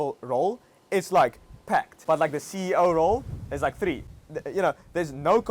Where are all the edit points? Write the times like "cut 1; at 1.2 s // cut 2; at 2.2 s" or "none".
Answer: cut 1; at 1.9 s // cut 2; at 4.1 s